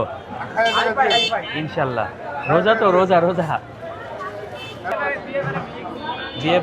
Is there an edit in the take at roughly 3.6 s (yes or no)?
no